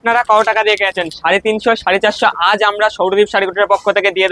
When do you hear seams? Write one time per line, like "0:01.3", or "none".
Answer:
none